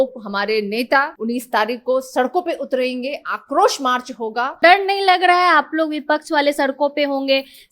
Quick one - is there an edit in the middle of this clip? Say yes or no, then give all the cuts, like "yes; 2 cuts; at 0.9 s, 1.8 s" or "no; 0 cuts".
yes; 2 cuts; at 1.1 s, 4.6 s